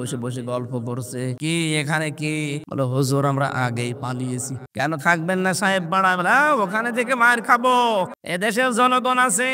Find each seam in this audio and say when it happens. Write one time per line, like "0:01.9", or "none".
0:01.4
0:02.6
0:04.6
0:08.2